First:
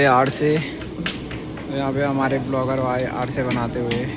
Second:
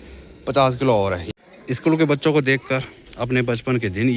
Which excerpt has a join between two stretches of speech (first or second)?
second